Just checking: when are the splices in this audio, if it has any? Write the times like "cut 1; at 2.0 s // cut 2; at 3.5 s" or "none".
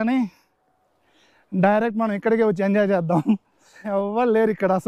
cut 1; at 3.9 s